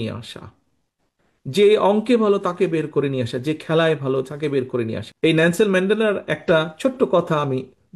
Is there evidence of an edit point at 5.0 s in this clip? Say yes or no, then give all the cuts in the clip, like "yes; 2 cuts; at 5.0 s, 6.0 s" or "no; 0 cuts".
yes; 1 cut; at 5.0 s